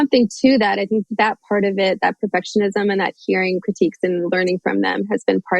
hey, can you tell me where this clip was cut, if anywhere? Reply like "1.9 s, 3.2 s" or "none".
1.1 s